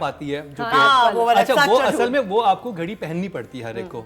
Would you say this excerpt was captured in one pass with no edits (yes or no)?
yes